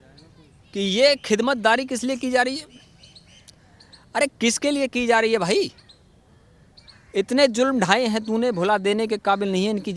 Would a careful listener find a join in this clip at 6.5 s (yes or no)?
no